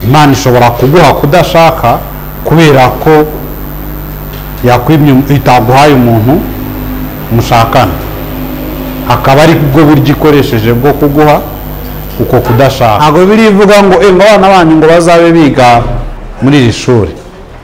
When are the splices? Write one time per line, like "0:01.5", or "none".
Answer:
0:13.0